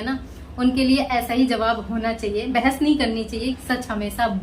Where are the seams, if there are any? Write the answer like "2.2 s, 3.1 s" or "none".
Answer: 3.5 s

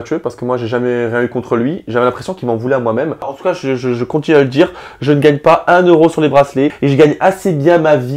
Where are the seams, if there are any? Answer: 3.3 s, 6.8 s

